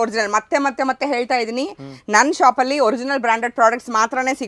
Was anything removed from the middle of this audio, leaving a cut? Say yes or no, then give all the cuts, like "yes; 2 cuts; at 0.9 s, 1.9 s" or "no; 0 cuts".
no; 0 cuts